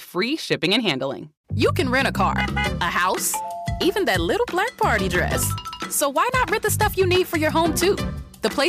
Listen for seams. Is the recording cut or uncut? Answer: cut